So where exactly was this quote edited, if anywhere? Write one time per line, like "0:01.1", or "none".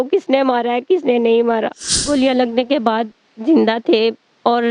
0:01.9